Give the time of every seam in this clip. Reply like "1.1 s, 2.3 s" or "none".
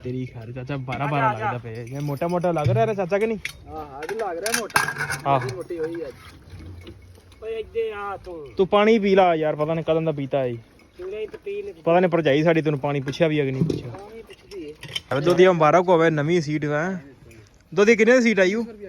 14.9 s